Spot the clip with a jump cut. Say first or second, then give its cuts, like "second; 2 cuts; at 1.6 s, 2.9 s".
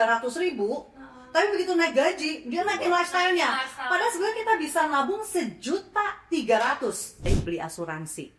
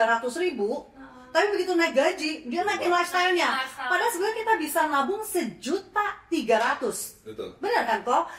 first; 1 cut; at 7.3 s